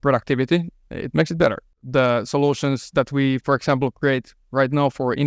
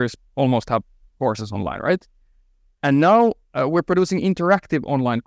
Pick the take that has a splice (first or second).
first